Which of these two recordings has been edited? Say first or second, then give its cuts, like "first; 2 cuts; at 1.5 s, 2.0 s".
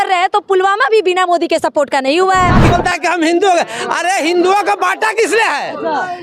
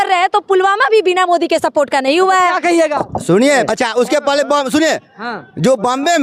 first; 1 cut; at 2.6 s